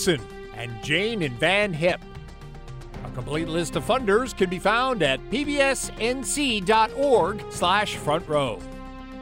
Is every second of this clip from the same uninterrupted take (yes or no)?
yes